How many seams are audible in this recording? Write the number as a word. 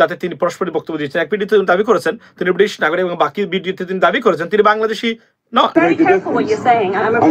one